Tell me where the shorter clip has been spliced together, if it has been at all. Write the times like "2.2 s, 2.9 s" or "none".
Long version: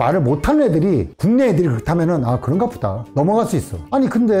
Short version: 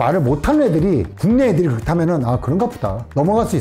none